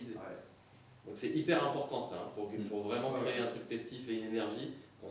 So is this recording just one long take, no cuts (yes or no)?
yes